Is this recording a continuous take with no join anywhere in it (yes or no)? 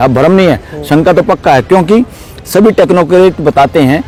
yes